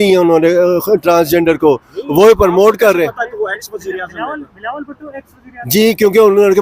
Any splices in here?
no; 0 cuts

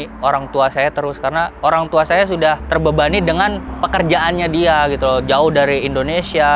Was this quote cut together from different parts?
yes; 2 cuts; at 1.5 s, 2.6 s

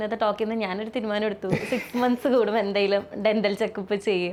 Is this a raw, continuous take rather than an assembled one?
yes; 0 cuts

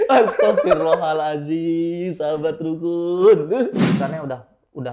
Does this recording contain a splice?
yes; 1 cut; at 3.8 s

